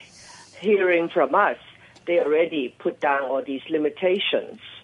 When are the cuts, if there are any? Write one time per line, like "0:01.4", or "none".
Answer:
none